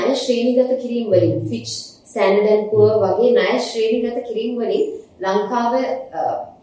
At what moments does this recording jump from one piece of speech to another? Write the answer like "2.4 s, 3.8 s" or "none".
none